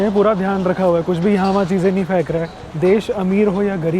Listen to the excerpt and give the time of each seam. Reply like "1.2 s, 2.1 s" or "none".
2.6 s